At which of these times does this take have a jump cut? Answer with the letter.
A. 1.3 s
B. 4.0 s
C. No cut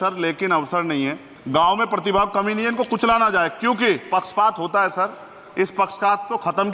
A